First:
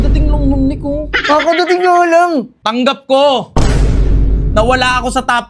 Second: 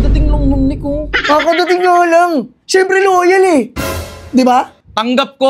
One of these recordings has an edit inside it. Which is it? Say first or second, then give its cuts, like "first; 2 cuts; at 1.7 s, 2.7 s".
first; 1 cut; at 2.5 s